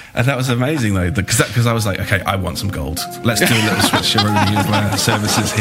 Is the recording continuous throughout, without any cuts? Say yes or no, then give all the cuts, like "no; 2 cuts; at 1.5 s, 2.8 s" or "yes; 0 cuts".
yes; 0 cuts